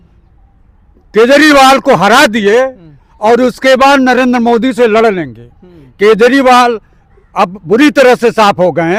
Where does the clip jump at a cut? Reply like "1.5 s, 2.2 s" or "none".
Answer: none